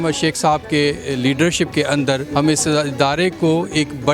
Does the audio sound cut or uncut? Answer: cut